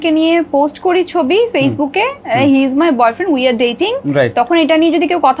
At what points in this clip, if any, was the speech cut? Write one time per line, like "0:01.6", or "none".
none